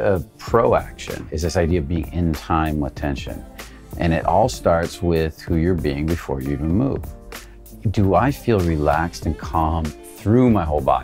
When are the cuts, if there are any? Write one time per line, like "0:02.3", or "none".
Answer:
0:01.3